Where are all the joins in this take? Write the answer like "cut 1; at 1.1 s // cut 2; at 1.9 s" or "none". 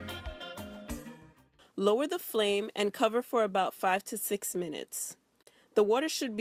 none